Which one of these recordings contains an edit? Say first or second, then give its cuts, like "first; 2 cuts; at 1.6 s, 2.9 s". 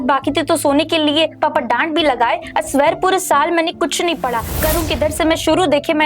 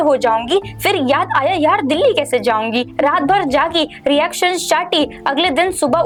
first; 1 cut; at 4.5 s